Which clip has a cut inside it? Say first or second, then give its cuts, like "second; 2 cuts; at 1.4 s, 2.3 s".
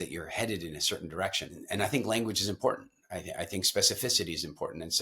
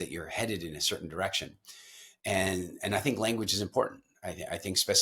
first; 1 cut; at 1.6 s